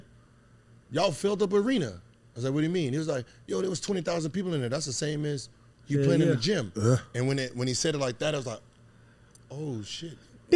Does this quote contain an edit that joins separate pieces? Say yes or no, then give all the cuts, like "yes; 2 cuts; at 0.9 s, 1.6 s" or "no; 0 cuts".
no; 0 cuts